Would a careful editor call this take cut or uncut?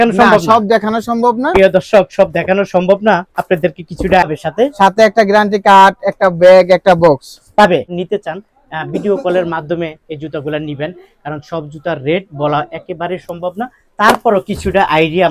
cut